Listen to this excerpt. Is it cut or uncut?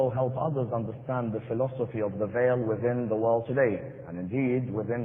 cut